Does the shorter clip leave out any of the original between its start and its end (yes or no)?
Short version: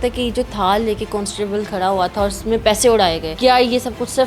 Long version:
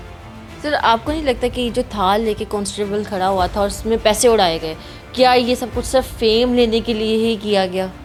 yes